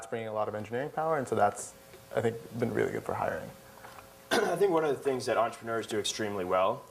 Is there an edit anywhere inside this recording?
yes; 1 cut; at 2.5 s

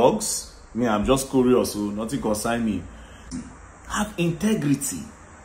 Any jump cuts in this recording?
yes; 1 cut; at 3.2 s

